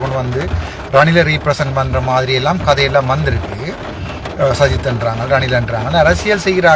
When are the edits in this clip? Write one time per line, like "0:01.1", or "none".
none